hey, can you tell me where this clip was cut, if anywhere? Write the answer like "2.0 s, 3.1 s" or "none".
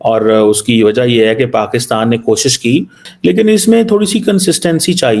3.0 s